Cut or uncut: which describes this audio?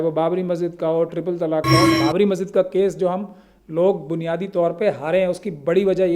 cut